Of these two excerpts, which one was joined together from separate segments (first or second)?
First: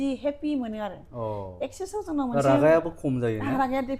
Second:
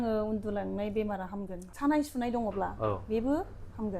second